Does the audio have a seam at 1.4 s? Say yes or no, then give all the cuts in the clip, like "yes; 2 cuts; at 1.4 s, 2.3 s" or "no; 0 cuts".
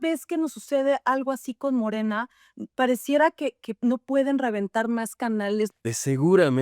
no; 1 cut; at 5.7 s